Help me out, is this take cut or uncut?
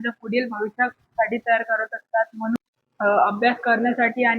cut